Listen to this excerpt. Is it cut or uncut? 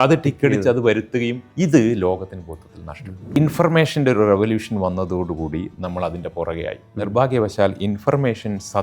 cut